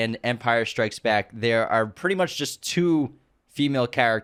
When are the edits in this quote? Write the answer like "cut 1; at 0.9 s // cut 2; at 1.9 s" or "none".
none